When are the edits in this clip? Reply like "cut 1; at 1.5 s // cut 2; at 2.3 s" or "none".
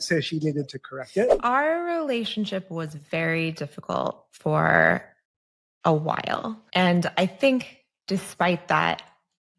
cut 1; at 1.4 s // cut 2; at 6.6 s